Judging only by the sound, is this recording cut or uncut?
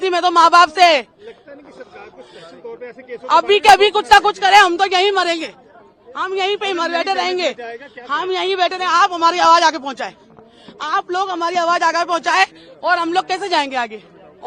uncut